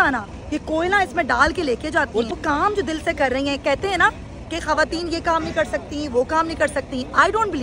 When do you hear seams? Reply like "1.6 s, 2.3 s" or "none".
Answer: 2.3 s